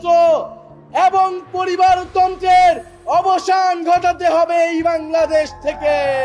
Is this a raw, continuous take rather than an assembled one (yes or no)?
yes